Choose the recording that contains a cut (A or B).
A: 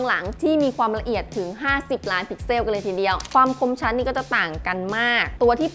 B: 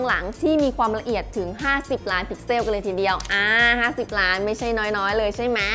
A